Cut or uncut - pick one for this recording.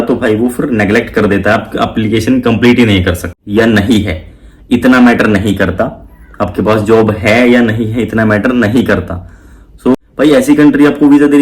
cut